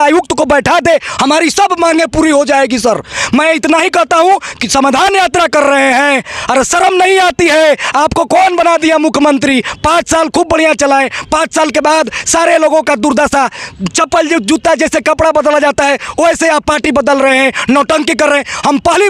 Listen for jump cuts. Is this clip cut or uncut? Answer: uncut